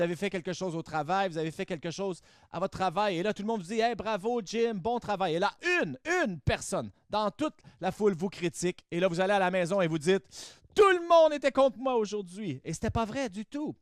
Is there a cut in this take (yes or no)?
no